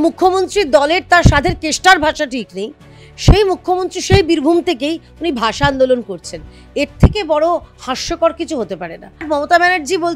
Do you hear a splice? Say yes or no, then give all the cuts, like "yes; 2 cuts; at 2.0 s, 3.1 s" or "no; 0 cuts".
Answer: yes; 1 cut; at 9.2 s